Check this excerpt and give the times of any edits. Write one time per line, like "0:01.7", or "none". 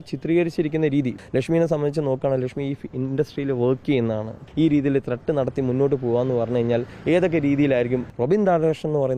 0:01.1
0:04.4
0:08.0

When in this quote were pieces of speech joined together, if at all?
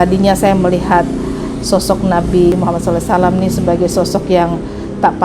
0:02.5

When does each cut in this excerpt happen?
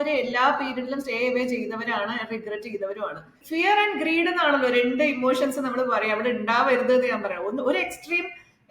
0:03.4

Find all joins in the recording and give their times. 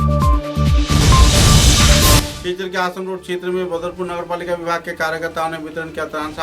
0:02.3

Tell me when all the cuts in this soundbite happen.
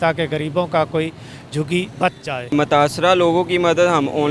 0:02.5

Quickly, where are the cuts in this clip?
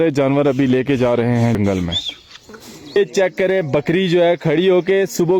0:01.5
0:03.0

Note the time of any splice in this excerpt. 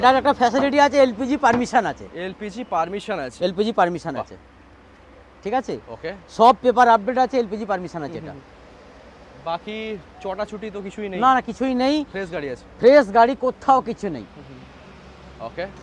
none

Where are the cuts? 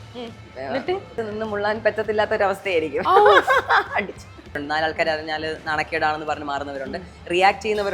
0:01.2
0:04.6

